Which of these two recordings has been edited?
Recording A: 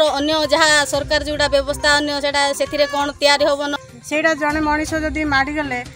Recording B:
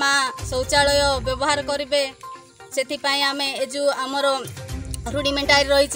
A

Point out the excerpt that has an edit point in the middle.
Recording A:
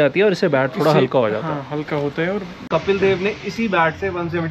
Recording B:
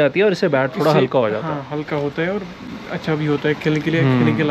A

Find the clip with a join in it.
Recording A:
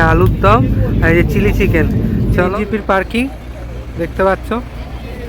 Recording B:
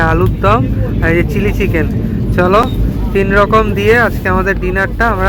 A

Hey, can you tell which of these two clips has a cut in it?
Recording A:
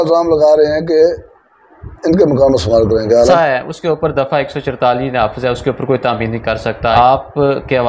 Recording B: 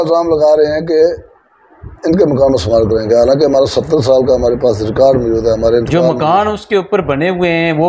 A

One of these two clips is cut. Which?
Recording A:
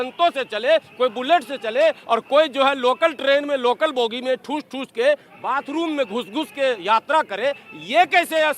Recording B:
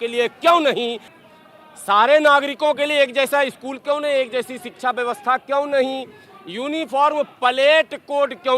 B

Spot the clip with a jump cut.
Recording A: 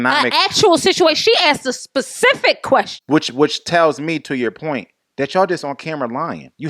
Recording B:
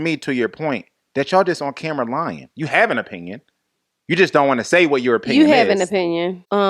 A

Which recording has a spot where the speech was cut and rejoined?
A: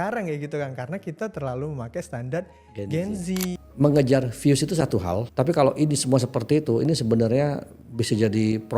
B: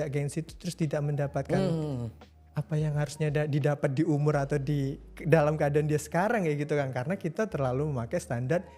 A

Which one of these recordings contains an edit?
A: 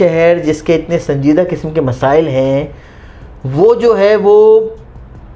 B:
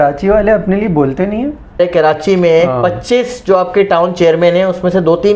B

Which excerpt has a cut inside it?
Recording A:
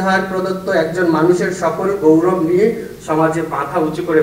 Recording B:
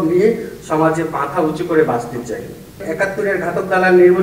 B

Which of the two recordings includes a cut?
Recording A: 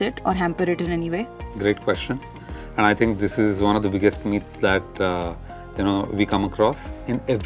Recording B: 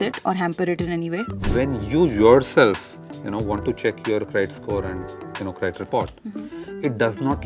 B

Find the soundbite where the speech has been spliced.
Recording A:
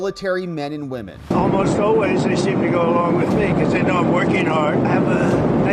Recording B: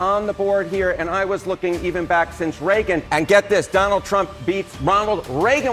A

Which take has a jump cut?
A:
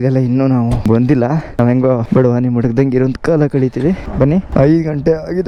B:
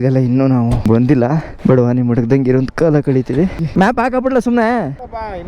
B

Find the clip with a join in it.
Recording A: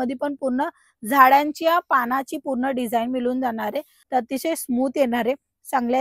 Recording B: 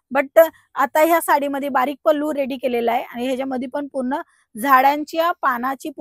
A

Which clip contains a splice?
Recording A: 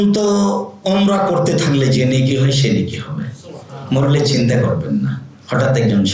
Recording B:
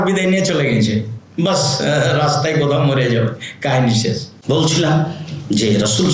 B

